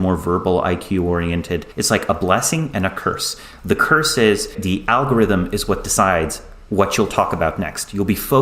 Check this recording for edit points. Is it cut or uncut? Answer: cut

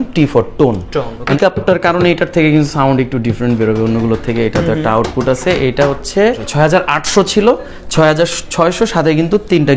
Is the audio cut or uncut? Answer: cut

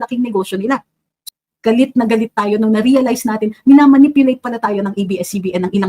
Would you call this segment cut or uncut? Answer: cut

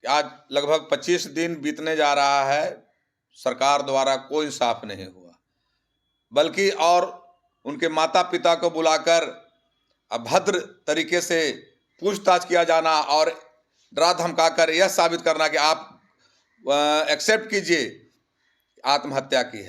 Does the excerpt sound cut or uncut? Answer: uncut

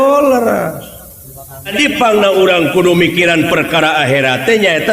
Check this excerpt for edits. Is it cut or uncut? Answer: cut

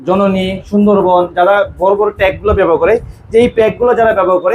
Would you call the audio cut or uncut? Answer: uncut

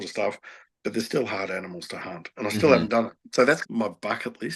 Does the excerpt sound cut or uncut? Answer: cut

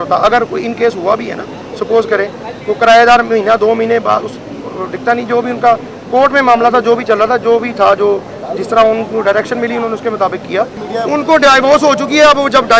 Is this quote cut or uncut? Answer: cut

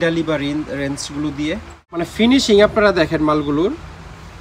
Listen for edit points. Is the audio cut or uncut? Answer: cut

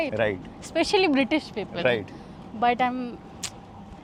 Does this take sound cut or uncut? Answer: uncut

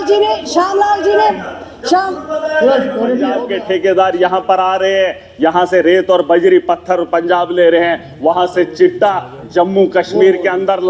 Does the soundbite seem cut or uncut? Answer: cut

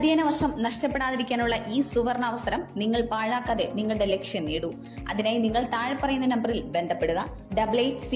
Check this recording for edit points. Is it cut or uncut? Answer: uncut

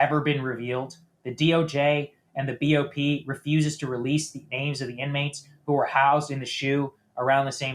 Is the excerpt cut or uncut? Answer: uncut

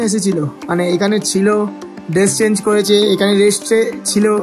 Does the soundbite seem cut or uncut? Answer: uncut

